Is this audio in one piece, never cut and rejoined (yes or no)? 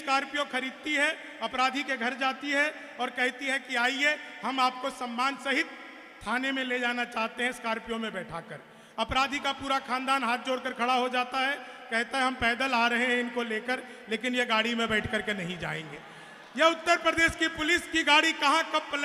yes